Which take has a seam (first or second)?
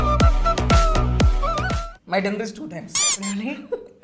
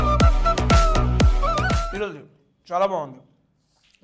first